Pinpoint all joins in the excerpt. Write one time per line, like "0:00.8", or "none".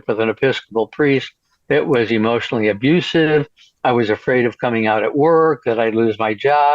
none